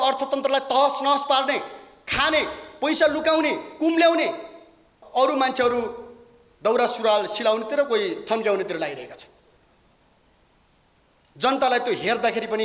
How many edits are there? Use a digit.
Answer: 1